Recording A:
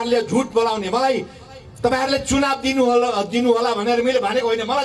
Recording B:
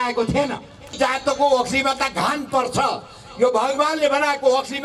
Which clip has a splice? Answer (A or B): B